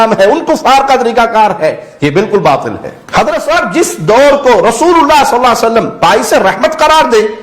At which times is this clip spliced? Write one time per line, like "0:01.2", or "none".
0:02.9